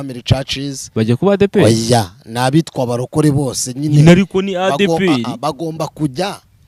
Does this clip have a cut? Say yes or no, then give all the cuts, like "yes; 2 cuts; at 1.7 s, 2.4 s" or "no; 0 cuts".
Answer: no; 0 cuts